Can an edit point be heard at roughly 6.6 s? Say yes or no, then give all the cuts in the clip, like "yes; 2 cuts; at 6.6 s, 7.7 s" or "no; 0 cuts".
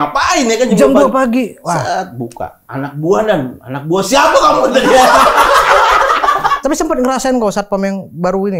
yes; 1 cut; at 6.6 s